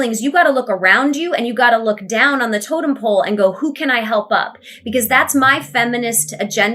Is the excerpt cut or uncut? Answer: uncut